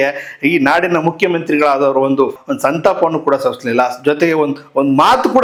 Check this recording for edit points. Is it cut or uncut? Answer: uncut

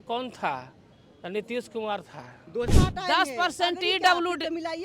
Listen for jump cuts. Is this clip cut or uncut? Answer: cut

